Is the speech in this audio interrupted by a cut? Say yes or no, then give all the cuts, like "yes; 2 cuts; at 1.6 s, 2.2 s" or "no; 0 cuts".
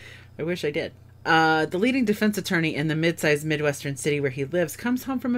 no; 0 cuts